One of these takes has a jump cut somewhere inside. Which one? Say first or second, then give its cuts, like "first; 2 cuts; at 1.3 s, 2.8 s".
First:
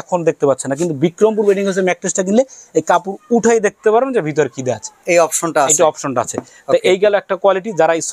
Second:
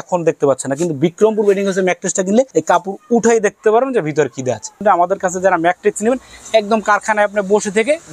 second; 2 cuts; at 2.5 s, 4.8 s